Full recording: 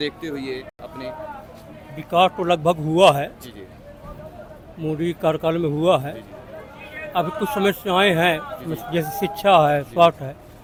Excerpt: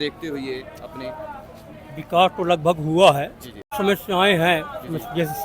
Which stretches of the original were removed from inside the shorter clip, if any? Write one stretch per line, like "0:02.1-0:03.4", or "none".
0:03.7-0:07.5